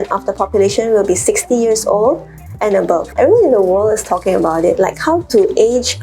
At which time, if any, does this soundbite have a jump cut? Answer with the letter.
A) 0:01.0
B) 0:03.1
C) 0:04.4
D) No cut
B